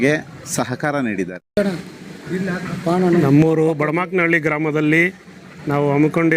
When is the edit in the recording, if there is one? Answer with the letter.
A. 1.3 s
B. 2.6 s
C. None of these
A